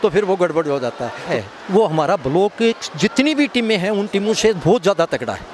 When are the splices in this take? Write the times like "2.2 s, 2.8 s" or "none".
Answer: 1.2 s